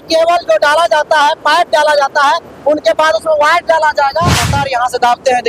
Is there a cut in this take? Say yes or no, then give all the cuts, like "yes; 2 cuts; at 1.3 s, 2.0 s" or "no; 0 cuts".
yes; 1 cut; at 4.5 s